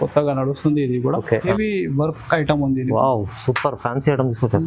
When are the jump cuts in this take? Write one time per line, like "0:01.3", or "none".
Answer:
0:01.5